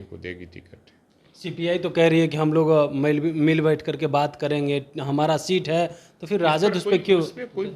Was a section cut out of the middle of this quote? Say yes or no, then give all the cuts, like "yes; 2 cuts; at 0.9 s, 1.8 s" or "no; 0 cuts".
no; 0 cuts